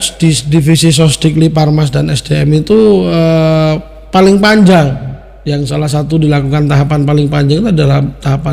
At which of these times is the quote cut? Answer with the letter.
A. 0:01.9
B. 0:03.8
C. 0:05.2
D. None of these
D